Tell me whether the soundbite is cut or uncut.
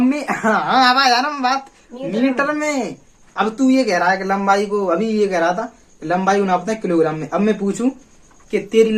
uncut